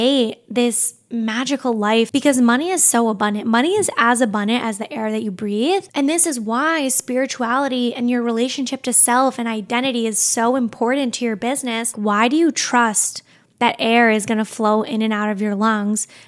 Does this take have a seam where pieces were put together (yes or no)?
yes